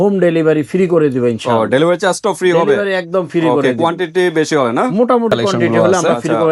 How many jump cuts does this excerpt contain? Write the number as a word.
zero